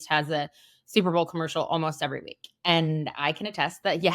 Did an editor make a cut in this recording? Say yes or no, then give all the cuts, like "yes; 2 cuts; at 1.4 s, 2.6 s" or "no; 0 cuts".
no; 0 cuts